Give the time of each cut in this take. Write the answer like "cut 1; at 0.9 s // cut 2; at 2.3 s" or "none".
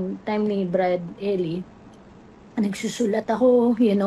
none